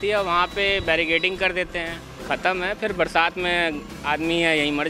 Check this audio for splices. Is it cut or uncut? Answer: cut